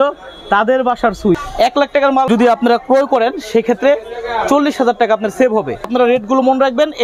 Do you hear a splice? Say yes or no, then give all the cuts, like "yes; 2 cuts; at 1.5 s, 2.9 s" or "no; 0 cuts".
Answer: yes; 2 cuts; at 1.4 s, 5.9 s